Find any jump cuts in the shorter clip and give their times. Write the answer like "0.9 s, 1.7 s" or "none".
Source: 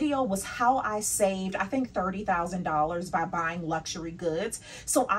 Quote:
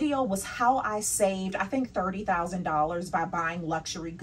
none